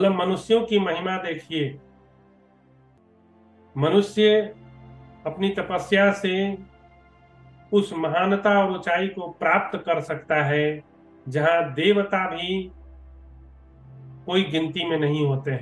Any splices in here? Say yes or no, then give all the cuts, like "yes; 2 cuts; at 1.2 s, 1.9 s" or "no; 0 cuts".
yes; 2 cuts; at 1.8 s, 3.7 s